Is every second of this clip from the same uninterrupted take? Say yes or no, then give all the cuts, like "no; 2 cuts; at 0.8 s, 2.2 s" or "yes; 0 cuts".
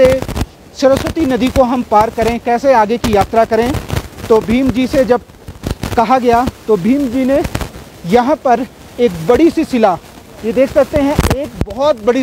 yes; 0 cuts